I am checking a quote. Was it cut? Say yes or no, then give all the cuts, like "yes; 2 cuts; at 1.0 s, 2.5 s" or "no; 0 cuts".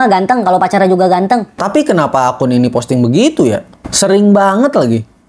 no; 0 cuts